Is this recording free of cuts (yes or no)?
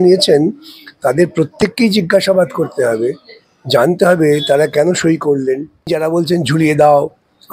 no